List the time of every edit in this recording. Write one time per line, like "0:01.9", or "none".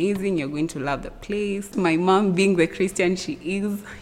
0:01.7